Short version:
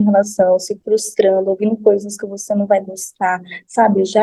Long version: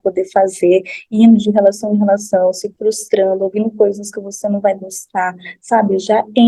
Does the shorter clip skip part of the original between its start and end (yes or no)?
no